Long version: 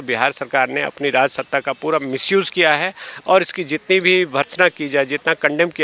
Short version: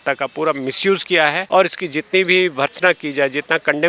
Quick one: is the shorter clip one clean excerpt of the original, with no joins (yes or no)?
no